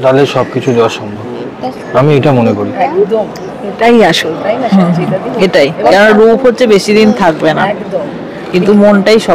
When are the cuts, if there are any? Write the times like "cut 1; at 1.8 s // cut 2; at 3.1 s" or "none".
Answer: none